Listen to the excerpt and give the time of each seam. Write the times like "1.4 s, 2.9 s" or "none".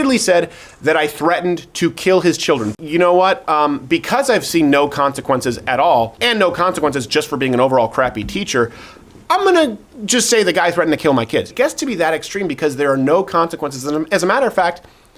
2.7 s, 6.2 s, 11.5 s